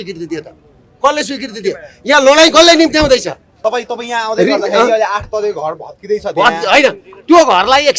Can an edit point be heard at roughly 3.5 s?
yes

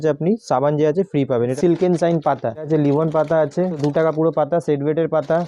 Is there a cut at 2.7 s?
yes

